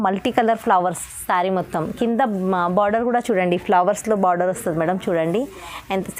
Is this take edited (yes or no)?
no